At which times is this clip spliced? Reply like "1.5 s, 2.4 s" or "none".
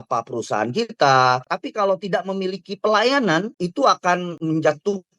1.6 s, 3.5 s, 4.3 s